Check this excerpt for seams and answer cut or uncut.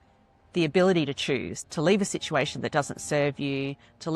cut